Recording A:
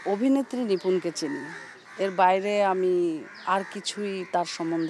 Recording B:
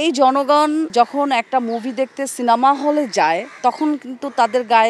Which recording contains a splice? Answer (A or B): B